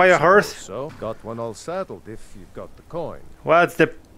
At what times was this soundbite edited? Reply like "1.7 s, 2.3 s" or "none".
0.9 s, 3.3 s